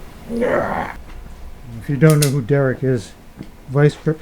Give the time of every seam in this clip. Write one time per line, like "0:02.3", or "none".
0:01.0